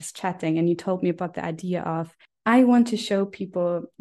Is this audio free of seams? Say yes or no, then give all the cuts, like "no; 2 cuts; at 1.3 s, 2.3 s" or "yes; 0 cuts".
no; 1 cut; at 2.2 s